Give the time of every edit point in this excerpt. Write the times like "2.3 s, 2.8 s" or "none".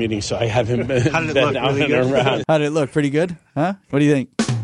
2.4 s